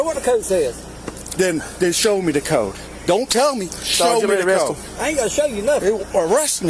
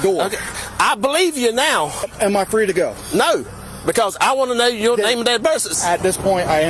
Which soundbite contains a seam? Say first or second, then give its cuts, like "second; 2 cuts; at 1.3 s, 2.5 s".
second; 2 cuts; at 2.1 s, 5.7 s